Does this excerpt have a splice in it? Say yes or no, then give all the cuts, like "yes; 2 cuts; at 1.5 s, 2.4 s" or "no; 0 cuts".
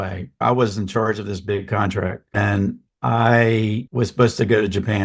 yes; 2 cuts; at 2.3 s, 3.9 s